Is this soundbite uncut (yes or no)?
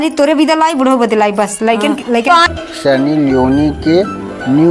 no